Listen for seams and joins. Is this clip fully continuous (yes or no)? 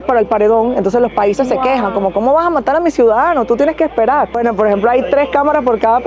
no